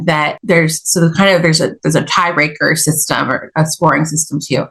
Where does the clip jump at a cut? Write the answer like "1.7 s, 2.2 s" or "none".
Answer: none